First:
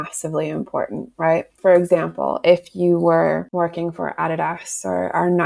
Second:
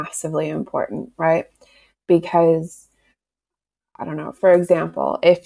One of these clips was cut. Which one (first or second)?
first